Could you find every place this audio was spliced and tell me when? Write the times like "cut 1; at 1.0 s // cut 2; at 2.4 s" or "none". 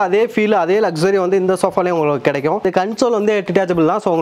cut 1; at 2.6 s